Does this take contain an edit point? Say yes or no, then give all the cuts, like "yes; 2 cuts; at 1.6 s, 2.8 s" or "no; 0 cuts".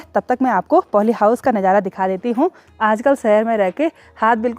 yes; 1 cut; at 2.6 s